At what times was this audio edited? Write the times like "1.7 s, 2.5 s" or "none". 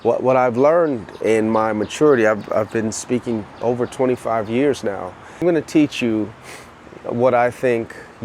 1.1 s, 5.4 s